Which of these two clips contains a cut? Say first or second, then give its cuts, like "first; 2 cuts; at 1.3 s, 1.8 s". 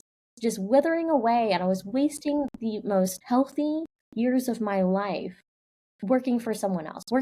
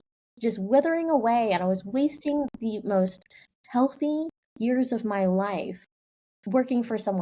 first; 1 cut; at 3.2 s